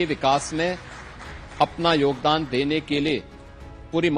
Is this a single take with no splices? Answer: yes; 0 cuts

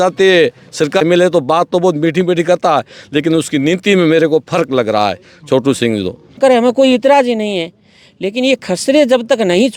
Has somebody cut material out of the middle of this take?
yes; 2 cuts; at 1.0 s, 6.4 s

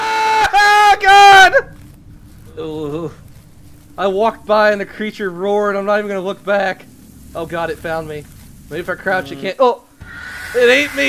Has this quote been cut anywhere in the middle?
no; 0 cuts

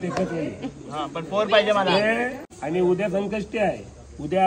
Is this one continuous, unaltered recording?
no; 1 cut; at 2.4 s

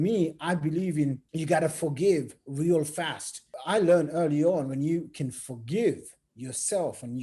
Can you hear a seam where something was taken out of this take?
yes; 2 cuts; at 1.3 s, 3.5 s

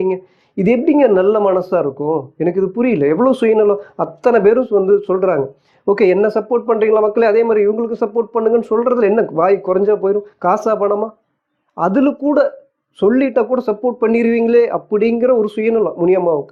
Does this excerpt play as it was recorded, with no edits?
yes; 0 cuts

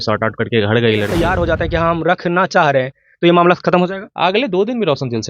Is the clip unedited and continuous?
no; 1 cut; at 1.3 s

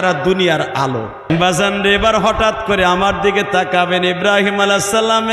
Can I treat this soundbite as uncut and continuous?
no; 1 cut; at 1.3 s

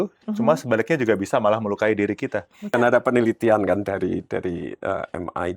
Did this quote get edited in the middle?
yes; 1 cut; at 2.7 s

